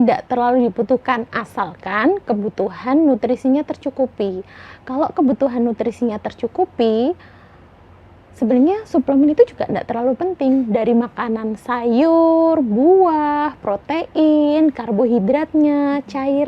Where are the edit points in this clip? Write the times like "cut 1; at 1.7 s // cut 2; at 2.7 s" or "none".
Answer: none